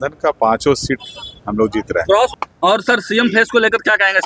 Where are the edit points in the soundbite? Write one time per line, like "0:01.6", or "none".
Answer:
0:02.3